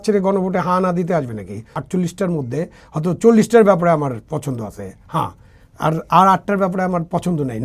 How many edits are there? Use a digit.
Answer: 1